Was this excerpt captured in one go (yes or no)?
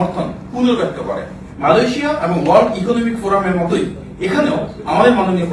no